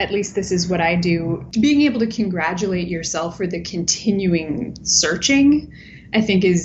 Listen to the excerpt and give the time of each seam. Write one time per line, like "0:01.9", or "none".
0:01.5